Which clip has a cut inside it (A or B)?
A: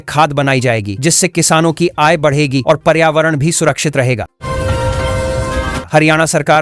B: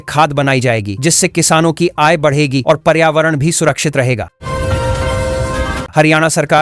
B